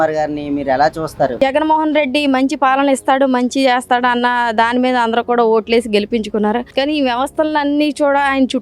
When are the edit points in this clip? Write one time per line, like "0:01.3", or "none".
0:01.4